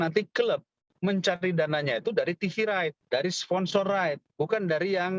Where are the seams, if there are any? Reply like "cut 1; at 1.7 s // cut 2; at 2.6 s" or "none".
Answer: cut 1; at 3.0 s // cut 2; at 4.2 s

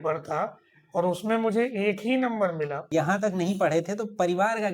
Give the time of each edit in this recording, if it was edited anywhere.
cut 1; at 2.8 s

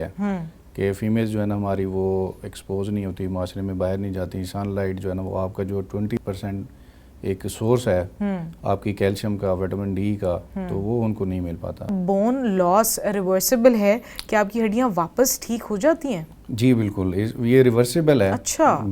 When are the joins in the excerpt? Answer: cut 1; at 6.2 s // cut 2; at 11.9 s

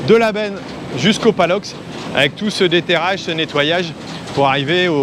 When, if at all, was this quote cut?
none

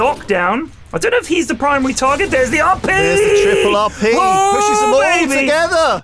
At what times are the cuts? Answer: none

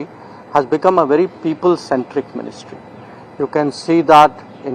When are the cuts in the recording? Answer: none

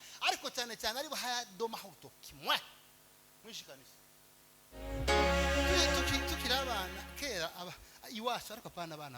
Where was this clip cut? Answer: cut 1; at 5.0 s

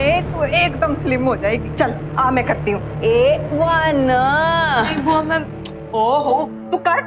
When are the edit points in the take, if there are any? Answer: cut 1; at 1.7 s

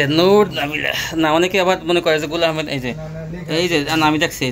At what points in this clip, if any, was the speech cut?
none

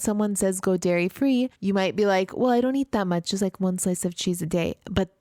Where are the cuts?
cut 1; at 1.6 s

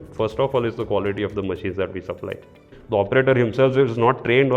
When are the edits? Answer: cut 1; at 2.7 s

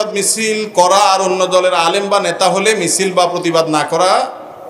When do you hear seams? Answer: none

